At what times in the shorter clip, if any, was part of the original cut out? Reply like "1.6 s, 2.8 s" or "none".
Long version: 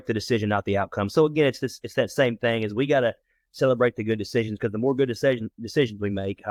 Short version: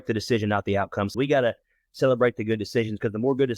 1.1 s